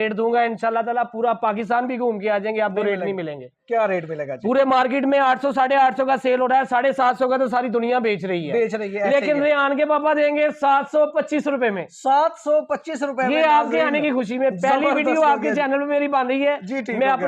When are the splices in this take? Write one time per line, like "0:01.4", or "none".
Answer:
none